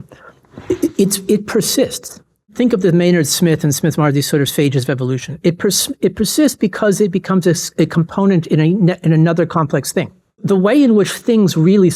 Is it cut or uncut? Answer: cut